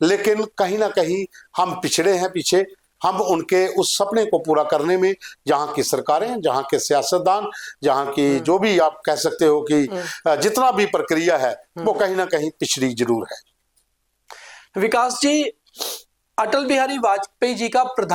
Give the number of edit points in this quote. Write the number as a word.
zero